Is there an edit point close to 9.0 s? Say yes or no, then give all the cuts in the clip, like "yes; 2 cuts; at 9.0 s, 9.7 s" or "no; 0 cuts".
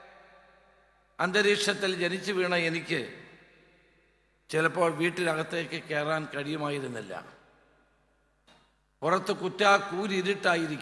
no; 0 cuts